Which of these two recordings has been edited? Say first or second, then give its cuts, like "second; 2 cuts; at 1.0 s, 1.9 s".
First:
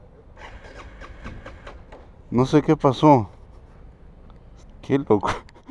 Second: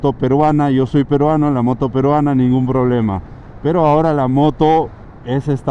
first; 1 cut; at 4.6 s